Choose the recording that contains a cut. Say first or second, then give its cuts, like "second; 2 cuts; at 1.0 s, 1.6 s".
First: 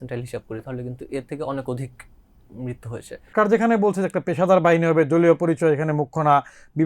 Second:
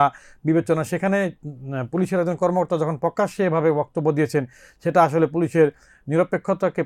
first; 1 cut; at 3.3 s